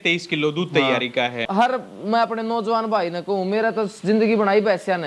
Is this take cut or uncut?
cut